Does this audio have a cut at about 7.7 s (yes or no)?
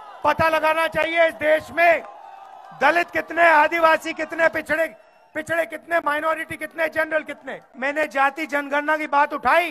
yes